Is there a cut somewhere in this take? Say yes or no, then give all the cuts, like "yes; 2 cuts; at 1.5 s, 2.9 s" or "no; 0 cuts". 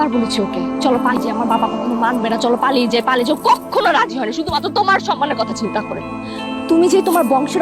yes; 1 cut; at 1.1 s